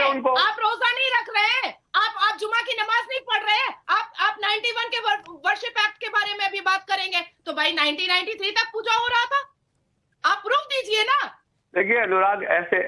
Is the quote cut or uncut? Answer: cut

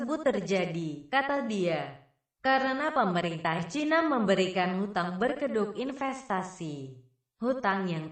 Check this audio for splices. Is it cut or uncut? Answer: uncut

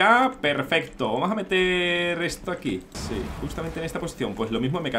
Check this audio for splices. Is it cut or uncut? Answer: cut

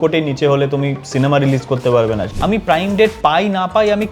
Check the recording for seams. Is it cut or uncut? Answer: cut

